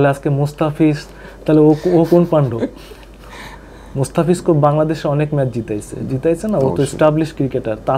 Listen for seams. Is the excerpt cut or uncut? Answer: uncut